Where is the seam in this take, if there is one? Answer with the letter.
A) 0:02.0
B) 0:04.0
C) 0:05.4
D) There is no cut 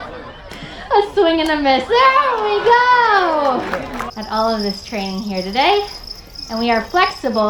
B